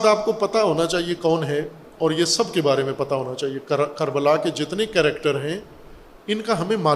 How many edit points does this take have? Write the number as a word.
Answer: one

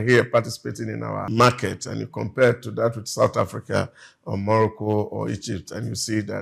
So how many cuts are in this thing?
one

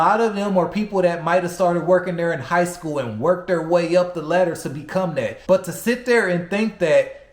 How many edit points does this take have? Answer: one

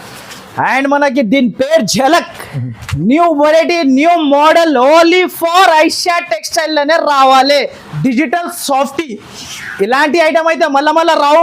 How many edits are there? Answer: one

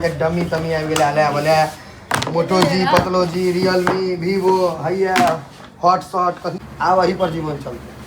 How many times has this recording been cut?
one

